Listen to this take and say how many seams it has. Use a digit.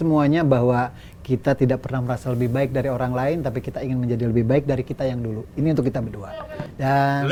0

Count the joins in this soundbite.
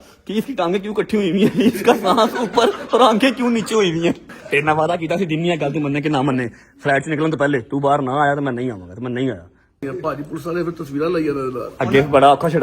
2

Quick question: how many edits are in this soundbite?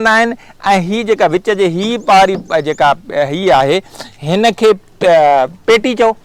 0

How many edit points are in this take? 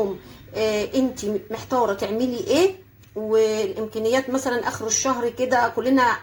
0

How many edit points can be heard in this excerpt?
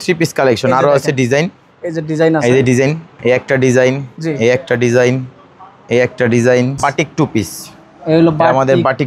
1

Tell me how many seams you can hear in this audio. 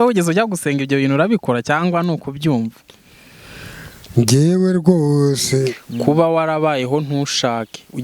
1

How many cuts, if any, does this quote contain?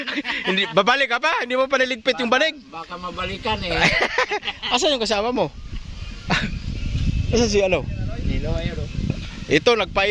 0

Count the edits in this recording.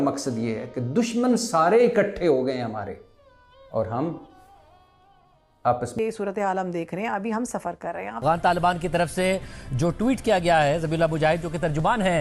1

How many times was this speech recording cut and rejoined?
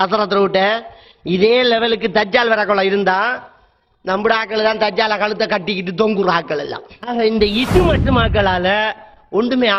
1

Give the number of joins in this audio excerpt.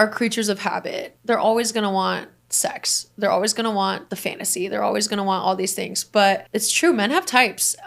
3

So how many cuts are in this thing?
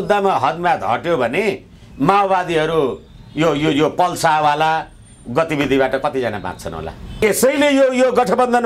0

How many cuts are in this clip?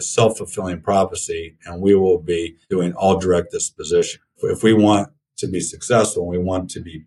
1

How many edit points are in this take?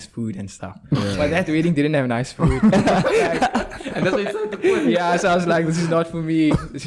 0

